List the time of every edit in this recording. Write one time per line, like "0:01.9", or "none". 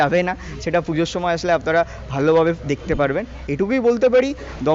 0:03.7